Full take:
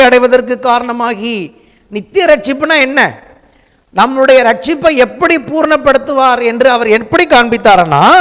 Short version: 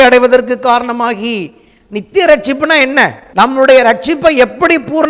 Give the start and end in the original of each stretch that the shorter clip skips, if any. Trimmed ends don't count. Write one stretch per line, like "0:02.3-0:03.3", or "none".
0:03.2-0:03.8